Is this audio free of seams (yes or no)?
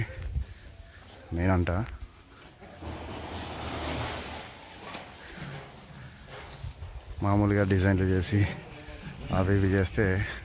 yes